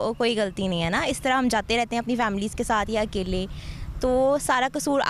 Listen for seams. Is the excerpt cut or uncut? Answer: uncut